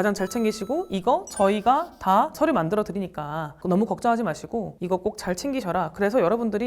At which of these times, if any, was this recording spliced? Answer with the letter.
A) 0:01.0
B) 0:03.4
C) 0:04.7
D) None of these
C